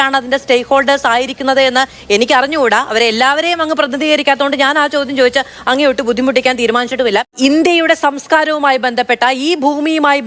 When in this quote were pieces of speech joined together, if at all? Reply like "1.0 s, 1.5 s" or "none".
7.3 s